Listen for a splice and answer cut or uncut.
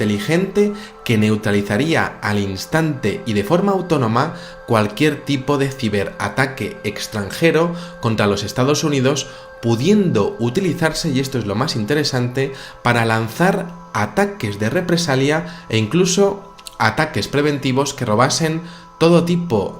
cut